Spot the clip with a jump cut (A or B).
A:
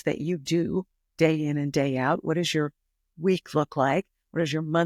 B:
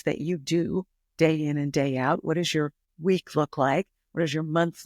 B